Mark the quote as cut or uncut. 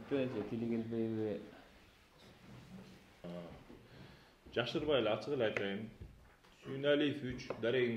cut